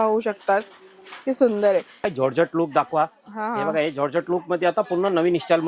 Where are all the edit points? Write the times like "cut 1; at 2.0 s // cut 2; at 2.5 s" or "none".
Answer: cut 1; at 2.0 s